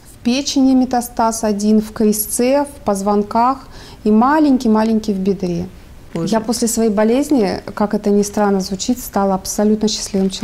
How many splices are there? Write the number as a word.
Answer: one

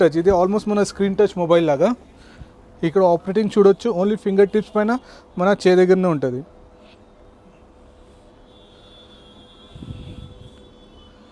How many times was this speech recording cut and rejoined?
zero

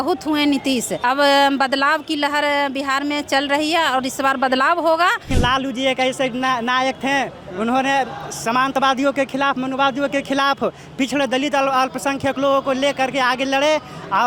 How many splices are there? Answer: two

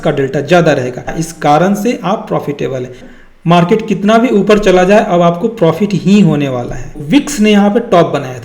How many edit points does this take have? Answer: three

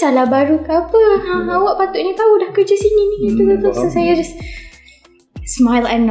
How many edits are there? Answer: zero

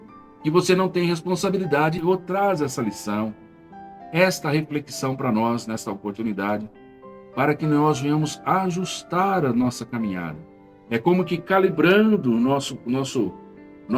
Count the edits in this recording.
one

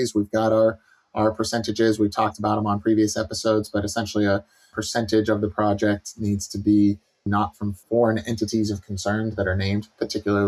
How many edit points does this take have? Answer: two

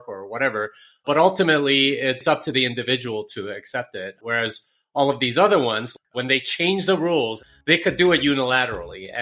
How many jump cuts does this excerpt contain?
three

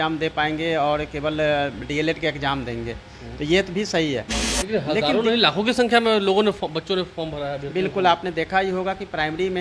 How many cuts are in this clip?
one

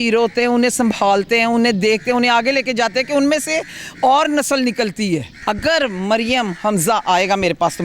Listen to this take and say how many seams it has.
one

